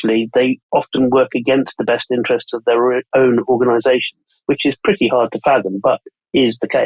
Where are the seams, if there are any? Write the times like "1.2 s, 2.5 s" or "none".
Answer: none